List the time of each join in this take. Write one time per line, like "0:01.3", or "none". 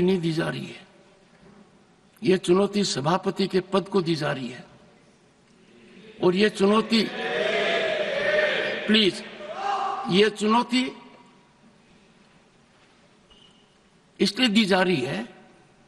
none